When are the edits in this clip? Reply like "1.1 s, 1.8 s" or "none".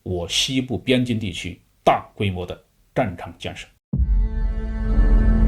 3.7 s

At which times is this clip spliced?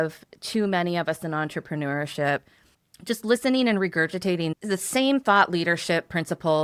none

